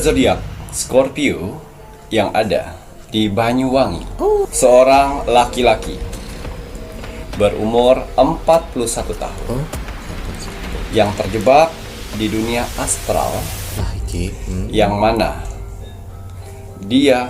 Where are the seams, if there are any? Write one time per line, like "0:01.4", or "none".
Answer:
0:04.5